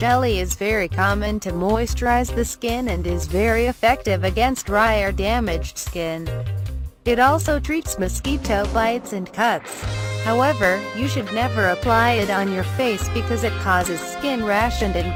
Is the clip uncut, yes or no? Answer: yes